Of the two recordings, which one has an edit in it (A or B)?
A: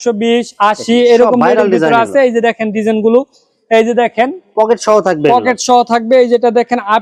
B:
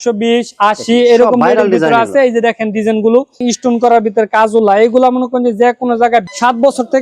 B